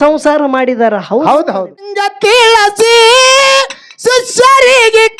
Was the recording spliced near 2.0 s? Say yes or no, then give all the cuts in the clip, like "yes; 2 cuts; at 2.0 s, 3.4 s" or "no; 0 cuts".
yes; 1 cut; at 2.0 s